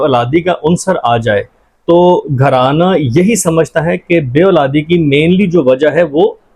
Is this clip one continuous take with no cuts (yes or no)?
yes